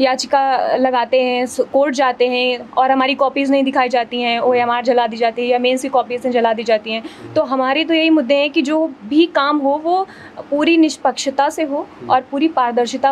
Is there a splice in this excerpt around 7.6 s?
no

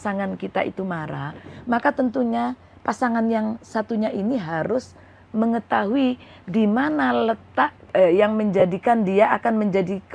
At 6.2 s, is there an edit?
no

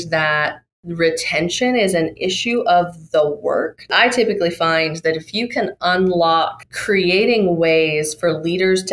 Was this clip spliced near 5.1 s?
no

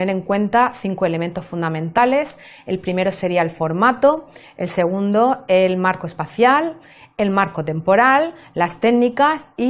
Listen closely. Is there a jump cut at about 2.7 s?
yes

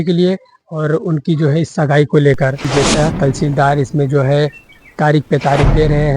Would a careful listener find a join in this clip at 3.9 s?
no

